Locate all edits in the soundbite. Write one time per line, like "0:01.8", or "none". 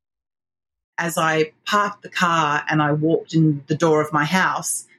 0:01.0